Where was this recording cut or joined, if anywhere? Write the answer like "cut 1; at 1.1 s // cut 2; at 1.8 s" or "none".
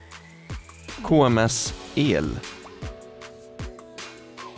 cut 1; at 2.4 s